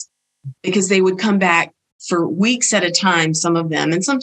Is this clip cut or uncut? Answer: uncut